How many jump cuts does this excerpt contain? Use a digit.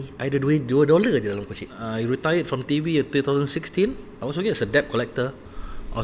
2